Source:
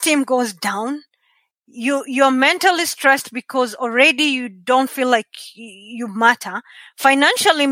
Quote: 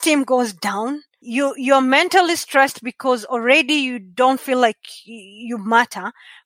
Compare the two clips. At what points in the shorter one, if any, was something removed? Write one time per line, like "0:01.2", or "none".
0:01.1